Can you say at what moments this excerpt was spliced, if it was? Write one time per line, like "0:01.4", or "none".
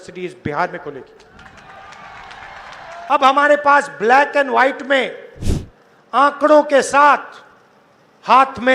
0:03.1